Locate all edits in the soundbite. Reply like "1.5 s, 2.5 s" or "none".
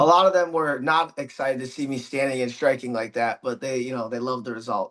none